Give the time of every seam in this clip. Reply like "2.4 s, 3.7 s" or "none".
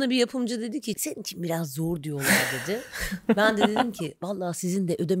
1.0 s